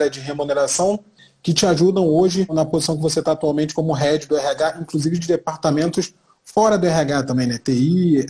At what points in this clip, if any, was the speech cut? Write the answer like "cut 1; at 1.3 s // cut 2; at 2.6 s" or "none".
cut 1; at 1.2 s // cut 2; at 2.5 s